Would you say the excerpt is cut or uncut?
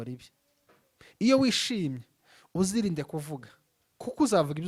uncut